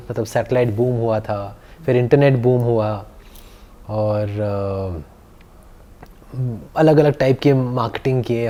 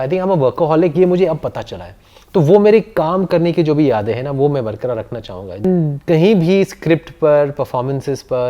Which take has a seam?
second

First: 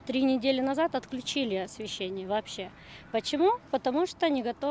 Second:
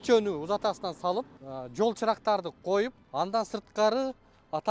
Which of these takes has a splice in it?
second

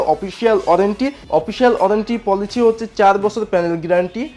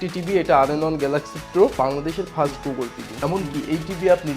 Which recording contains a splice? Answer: second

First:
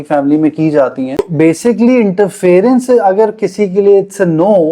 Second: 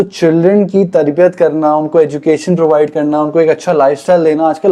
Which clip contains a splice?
first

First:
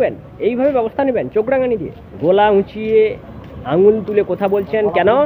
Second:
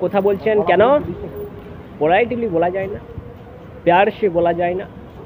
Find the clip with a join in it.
first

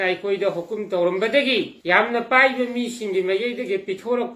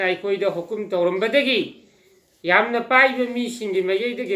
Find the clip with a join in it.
first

